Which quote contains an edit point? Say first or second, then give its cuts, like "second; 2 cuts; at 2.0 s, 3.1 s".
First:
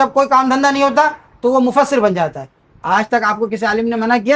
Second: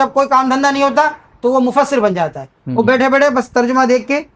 first; 1 cut; at 2.6 s